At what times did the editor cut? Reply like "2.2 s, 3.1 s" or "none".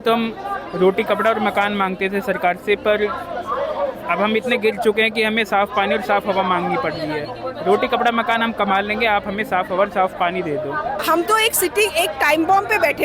11.0 s